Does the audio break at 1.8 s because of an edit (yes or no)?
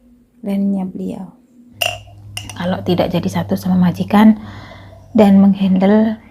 yes